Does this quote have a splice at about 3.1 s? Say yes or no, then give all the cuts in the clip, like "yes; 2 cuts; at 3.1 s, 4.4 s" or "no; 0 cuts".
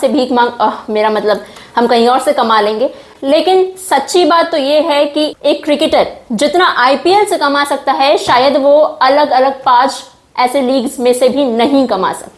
no; 0 cuts